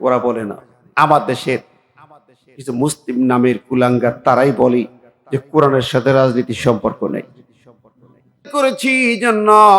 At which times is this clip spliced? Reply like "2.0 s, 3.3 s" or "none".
8.4 s